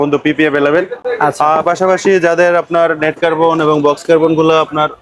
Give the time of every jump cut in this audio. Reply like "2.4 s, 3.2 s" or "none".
none